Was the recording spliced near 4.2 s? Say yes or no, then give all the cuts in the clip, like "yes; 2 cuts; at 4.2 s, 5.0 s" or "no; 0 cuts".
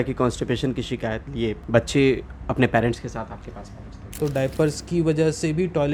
yes; 2 cuts; at 1.6 s, 4.2 s